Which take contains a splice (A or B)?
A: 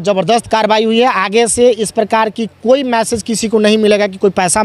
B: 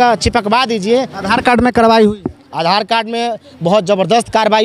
B